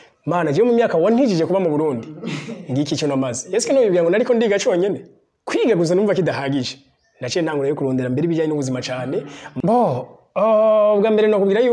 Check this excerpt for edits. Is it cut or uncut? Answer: cut